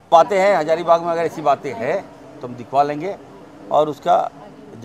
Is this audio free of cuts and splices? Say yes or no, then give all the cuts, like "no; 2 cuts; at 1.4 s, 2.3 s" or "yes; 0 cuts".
yes; 0 cuts